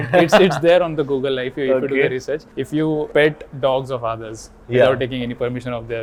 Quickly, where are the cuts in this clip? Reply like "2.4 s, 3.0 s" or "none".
none